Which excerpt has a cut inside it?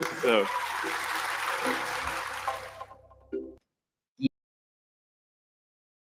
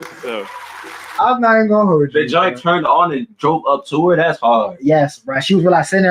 second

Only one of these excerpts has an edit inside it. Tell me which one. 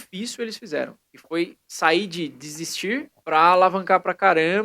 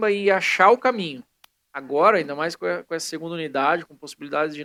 first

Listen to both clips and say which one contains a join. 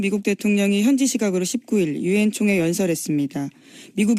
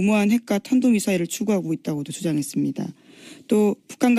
first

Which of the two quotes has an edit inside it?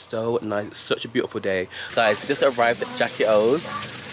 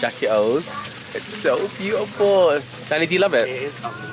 first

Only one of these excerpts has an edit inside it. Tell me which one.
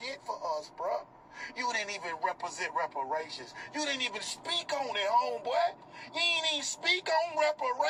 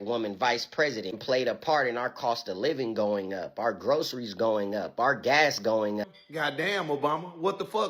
second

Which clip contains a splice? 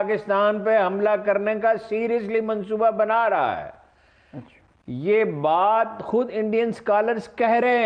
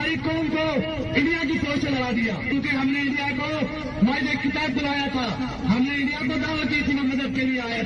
second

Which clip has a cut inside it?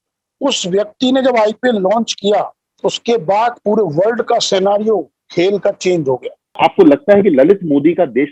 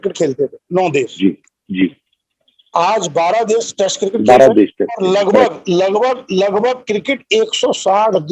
first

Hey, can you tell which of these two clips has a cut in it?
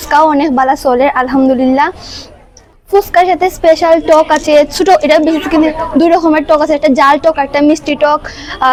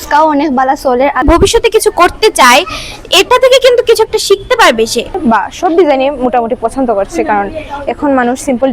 second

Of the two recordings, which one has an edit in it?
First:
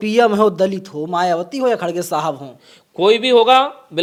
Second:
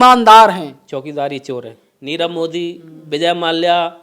second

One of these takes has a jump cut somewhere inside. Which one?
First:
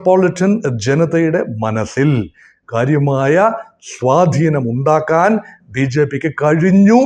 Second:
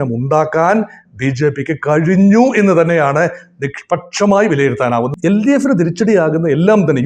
second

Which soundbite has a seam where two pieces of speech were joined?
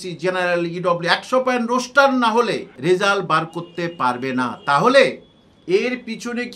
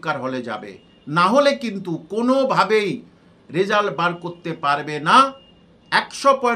first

